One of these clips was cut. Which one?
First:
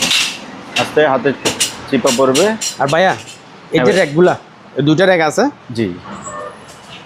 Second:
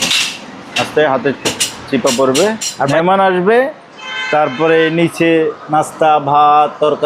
second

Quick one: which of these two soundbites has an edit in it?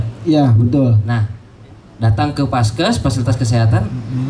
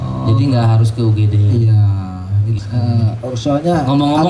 second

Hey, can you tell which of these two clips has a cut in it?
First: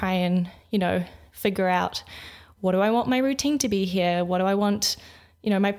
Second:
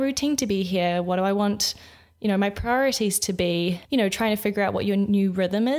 second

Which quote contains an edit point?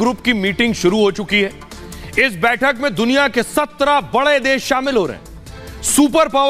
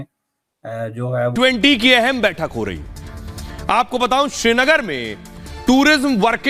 second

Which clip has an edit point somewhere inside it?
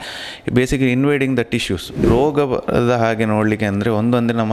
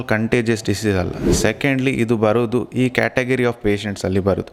first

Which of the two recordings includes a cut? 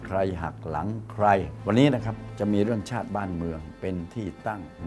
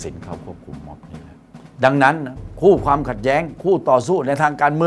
first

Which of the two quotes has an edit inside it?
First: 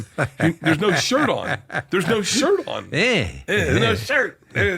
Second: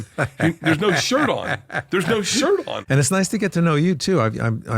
second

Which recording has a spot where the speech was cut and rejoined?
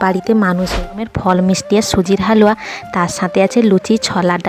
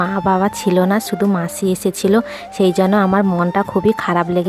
first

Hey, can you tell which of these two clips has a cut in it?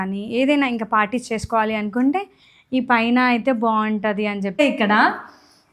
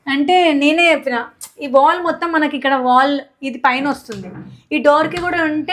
first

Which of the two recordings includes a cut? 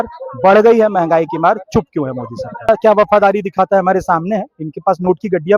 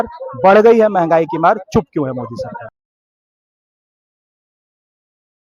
first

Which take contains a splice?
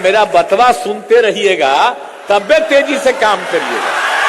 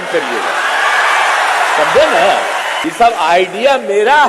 second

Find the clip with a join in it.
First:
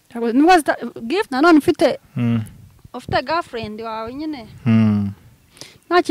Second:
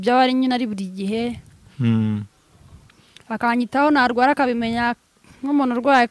first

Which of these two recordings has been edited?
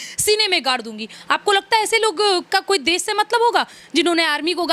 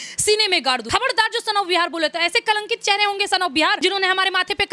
second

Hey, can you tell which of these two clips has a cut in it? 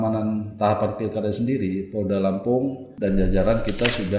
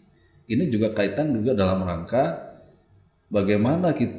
first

